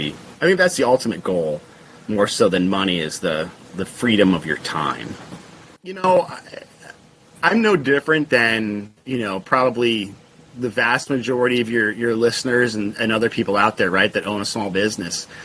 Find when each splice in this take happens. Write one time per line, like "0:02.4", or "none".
0:05.2